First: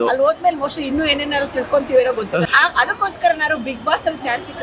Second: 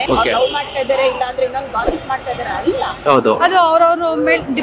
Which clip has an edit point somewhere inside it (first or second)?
second